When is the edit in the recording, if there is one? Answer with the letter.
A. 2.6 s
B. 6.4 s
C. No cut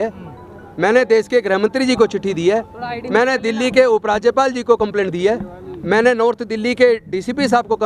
C